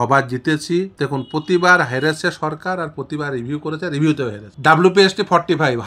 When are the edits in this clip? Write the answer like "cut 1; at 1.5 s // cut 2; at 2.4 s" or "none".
cut 1; at 0.9 s // cut 2; at 4.5 s

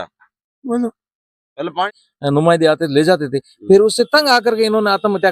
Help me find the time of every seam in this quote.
cut 1; at 1.9 s

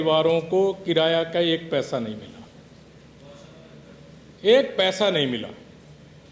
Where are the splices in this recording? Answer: none

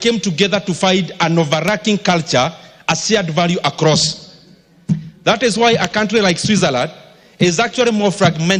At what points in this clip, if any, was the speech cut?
none

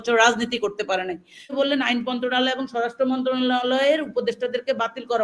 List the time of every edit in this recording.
cut 1; at 1.5 s

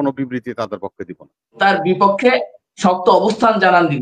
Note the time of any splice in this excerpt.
cut 1; at 1.5 s

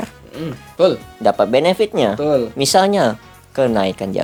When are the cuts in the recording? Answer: none

